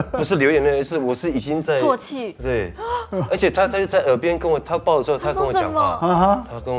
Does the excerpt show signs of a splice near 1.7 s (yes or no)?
no